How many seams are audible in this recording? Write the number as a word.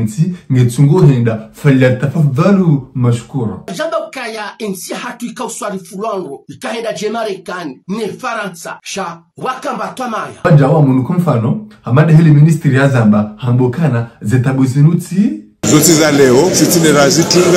one